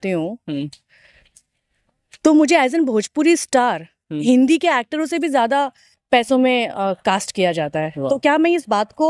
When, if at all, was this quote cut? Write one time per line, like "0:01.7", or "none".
none